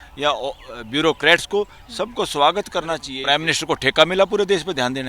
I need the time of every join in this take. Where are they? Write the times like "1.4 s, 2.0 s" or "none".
3.1 s